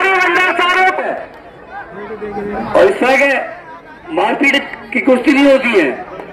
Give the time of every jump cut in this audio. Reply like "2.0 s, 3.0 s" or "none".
1.0 s